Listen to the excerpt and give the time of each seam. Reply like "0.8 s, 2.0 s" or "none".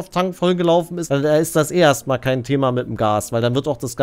1.0 s